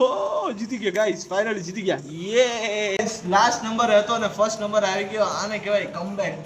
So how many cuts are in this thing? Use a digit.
1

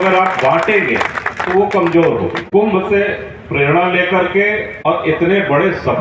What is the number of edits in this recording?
2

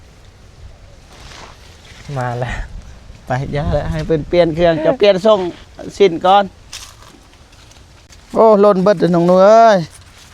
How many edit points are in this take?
1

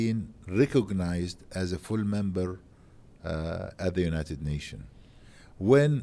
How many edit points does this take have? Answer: 0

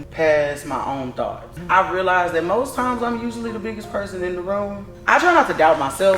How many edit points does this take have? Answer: 2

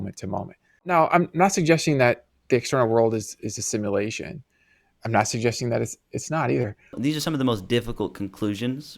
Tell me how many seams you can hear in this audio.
2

